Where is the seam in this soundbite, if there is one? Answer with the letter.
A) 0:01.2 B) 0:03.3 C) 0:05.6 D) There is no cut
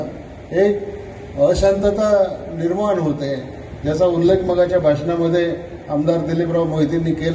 D